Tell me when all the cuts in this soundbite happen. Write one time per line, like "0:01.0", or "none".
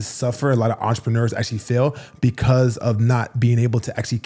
none